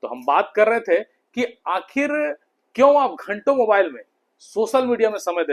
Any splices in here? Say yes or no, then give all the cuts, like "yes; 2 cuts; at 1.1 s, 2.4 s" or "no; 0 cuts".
no; 0 cuts